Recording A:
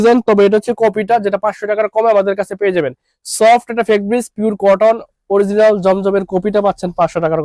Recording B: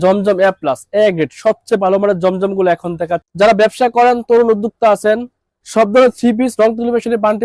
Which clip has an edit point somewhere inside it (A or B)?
B